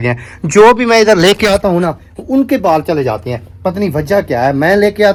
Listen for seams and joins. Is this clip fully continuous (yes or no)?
yes